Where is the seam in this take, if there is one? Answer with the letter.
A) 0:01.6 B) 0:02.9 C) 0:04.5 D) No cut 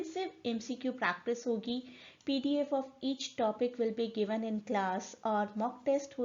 D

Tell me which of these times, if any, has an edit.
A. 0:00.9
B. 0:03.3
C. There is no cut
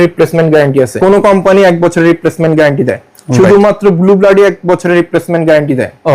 A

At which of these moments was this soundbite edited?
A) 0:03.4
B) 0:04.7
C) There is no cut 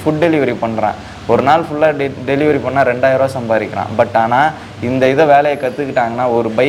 C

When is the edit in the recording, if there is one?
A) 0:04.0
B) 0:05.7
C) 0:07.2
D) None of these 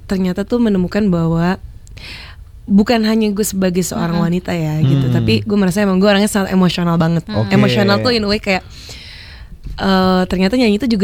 D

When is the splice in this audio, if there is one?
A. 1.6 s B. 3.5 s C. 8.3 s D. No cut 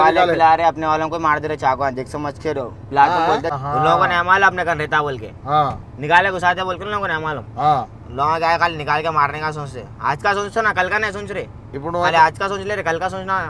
B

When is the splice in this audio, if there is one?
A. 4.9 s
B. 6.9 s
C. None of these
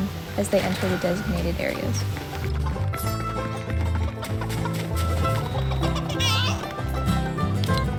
C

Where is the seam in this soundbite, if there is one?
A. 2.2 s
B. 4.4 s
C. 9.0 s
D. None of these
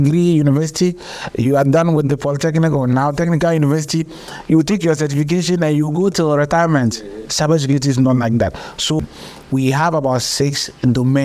C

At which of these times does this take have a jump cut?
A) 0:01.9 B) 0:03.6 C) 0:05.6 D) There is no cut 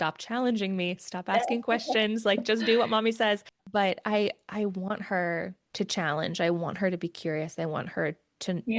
B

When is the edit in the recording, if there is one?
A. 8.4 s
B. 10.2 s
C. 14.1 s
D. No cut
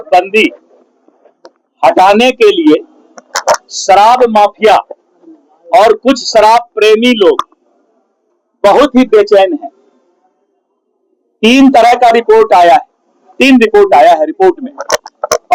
D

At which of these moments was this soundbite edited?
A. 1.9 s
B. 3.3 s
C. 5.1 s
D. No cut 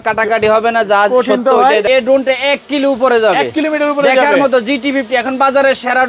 A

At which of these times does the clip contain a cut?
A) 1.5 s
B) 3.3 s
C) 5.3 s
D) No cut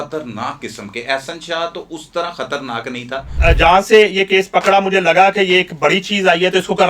B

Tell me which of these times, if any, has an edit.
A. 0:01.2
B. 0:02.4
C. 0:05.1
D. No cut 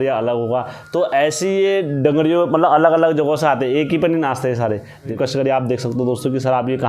C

